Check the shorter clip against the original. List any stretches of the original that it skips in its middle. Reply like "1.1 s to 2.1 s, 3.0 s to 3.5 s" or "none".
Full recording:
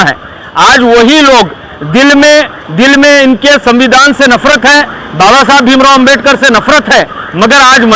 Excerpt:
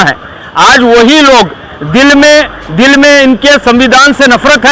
none